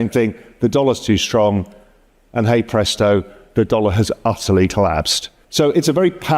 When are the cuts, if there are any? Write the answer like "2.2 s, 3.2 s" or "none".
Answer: 5.4 s

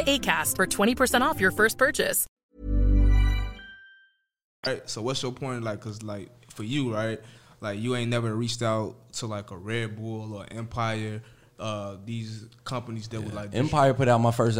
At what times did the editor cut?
none

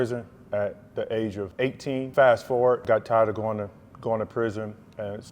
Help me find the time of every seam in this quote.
1.7 s, 2.8 s

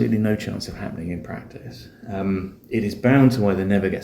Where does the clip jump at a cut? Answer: none

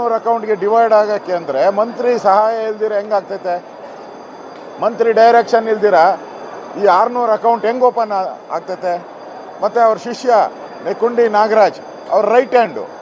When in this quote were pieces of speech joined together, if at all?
none

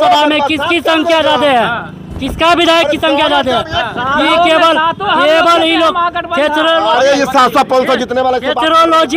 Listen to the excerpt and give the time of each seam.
none

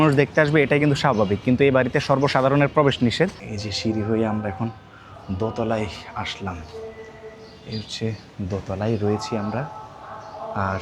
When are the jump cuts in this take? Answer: 3.5 s

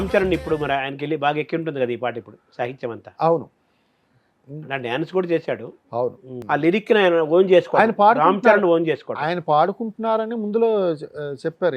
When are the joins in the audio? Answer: 6.4 s

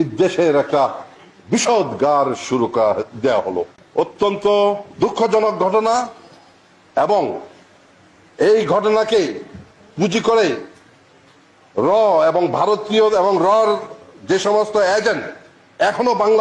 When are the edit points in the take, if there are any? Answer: none

